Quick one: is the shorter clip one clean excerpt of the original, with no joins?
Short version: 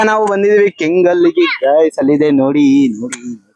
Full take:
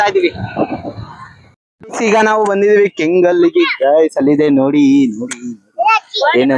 yes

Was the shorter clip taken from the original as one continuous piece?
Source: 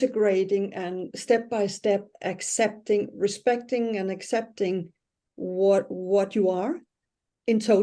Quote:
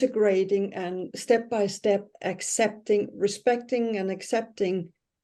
yes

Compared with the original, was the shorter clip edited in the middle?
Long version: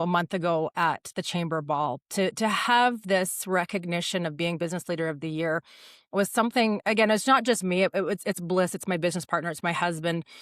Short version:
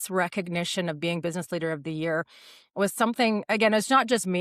no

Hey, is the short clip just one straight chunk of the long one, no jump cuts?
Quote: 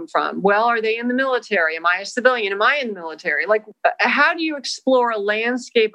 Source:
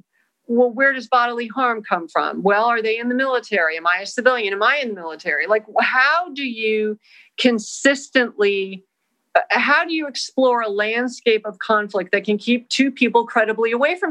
no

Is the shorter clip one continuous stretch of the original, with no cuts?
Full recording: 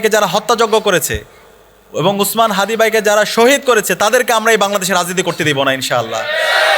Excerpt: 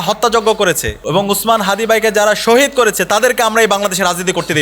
no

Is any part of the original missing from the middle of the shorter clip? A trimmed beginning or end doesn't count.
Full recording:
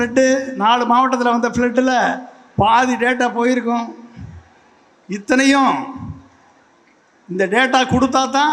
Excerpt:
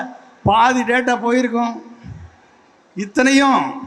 no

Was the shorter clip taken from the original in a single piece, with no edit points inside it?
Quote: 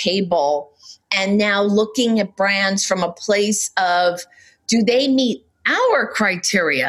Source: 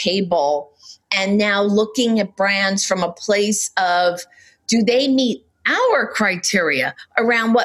yes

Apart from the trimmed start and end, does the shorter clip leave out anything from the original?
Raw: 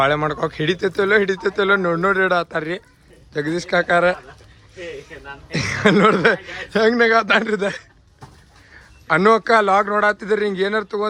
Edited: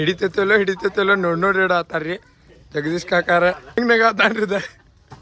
yes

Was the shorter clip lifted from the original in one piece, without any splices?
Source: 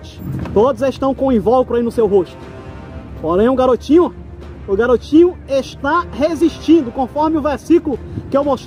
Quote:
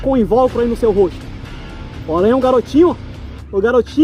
yes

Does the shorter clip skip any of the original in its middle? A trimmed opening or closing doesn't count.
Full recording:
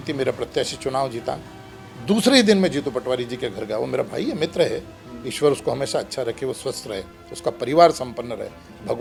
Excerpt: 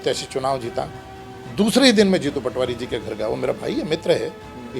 no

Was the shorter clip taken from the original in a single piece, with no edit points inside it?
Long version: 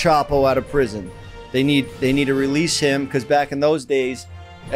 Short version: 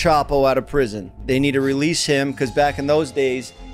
no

